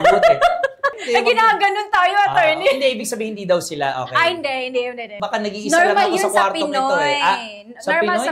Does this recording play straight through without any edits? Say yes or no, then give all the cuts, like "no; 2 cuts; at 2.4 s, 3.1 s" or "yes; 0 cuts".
no; 2 cuts; at 1.0 s, 5.1 s